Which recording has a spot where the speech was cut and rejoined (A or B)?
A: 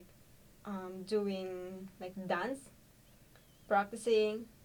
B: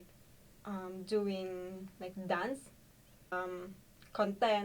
B